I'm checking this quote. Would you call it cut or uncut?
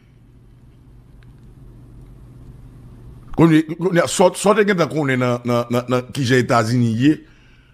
uncut